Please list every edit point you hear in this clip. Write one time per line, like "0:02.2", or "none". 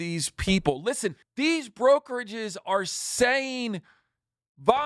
0:01.2